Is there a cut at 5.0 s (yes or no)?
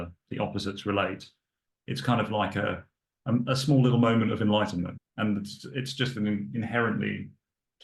yes